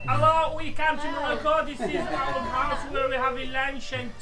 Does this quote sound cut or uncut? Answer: uncut